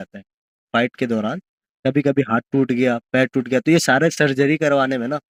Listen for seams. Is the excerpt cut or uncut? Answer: uncut